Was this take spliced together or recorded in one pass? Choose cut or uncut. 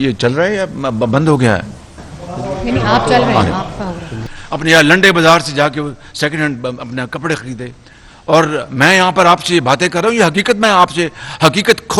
cut